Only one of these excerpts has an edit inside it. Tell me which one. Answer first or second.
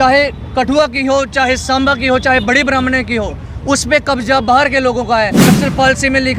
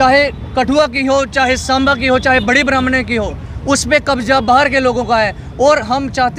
first